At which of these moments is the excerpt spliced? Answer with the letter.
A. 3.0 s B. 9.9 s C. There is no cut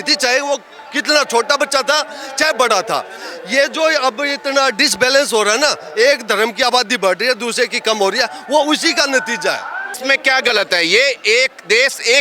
B